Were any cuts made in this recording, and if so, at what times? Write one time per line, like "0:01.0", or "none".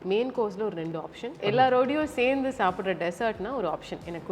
0:01.4